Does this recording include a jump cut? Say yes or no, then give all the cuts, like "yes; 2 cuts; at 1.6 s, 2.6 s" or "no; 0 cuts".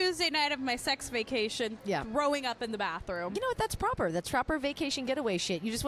no; 0 cuts